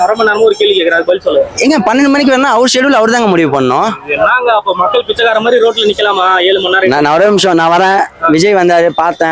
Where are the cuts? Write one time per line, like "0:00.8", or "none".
none